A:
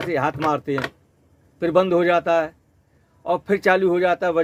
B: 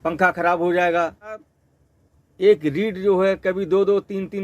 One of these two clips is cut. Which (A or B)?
B